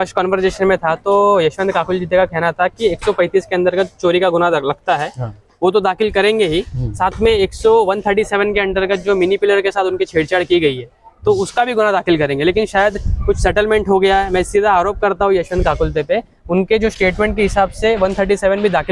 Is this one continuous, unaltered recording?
yes; 0 cuts

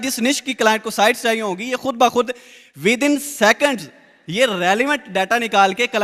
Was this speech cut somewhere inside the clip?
no; 0 cuts

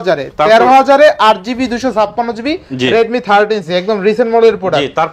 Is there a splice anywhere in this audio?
no; 0 cuts

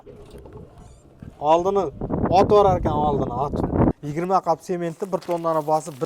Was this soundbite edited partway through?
yes; 1 cut; at 3.9 s

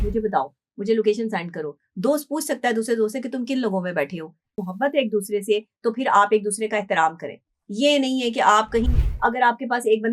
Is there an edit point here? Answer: yes; 1 cut; at 4.6 s

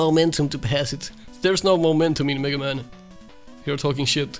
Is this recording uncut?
yes; 0 cuts

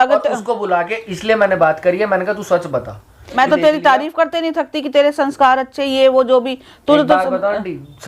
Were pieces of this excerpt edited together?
yes; 1 cut; at 3.4 s

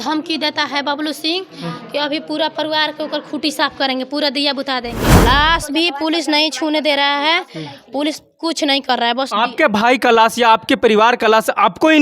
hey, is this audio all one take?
no; 1 cut; at 5.1 s

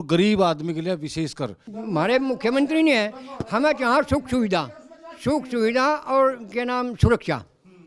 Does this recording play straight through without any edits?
no; 1 cut; at 1.6 s

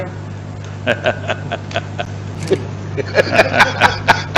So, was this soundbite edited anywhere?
yes; 1 cut; at 2.3 s

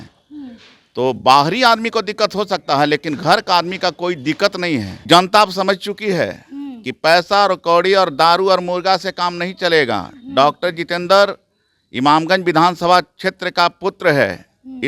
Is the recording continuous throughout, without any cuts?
no; 1 cut; at 4.9 s

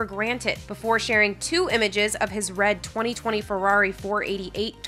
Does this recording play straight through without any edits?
yes; 0 cuts

